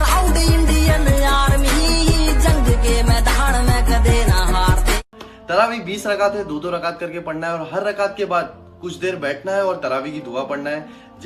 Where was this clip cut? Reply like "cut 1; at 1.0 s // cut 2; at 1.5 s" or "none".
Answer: cut 1; at 5.2 s